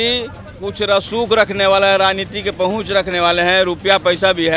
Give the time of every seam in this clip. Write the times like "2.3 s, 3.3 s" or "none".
none